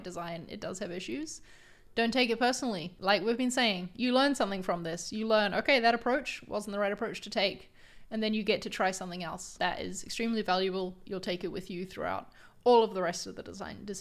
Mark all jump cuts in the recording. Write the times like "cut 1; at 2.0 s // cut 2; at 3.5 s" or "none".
cut 1; at 2.9 s // cut 2; at 9.5 s